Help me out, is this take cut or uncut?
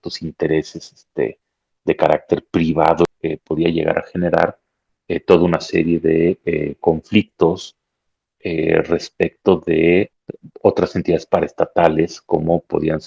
cut